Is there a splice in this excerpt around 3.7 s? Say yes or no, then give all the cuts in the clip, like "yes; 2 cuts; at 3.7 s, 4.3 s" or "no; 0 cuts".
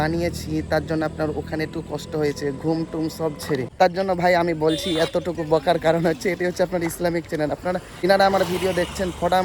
yes; 1 cut; at 3.7 s